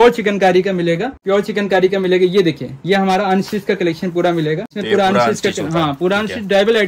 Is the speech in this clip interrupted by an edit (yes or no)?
yes